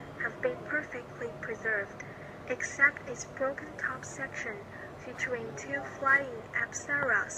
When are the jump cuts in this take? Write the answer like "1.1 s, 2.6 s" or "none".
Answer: 3.0 s

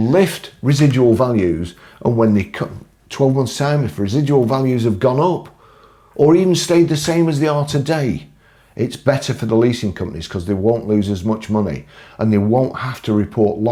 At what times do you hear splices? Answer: none

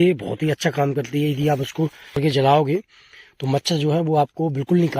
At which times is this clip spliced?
2.2 s

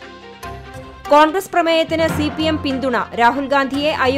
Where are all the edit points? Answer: 1.1 s

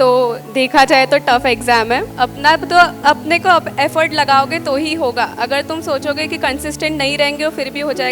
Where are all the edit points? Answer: 2.1 s

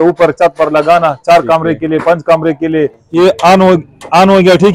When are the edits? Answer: 3.0 s

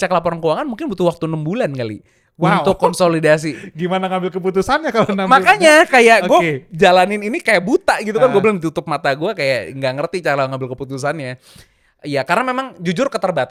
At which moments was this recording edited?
none

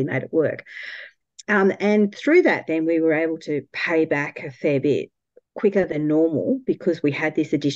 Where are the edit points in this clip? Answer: none

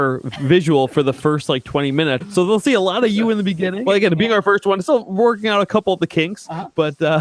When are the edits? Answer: 2.2 s, 3.8 s

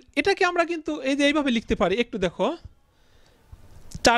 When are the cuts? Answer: none

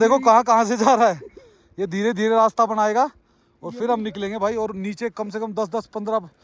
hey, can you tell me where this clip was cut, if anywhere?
none

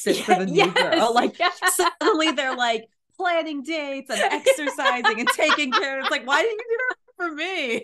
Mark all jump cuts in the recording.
none

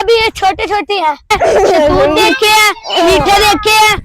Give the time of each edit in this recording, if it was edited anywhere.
1.3 s

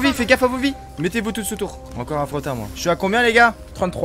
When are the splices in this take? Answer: 1.8 s

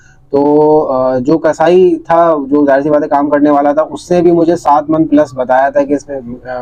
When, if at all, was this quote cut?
none

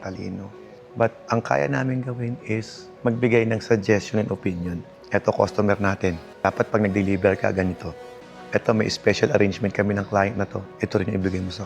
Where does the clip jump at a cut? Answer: 4.8 s

